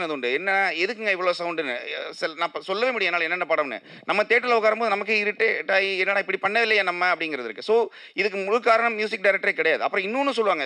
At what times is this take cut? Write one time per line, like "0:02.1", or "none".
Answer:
none